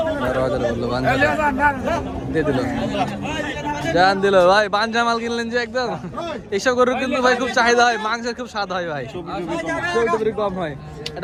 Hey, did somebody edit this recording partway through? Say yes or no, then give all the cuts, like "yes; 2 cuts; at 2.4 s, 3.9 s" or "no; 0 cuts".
no; 0 cuts